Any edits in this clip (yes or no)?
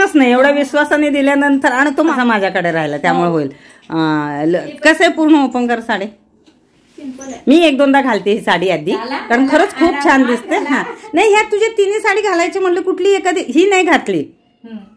no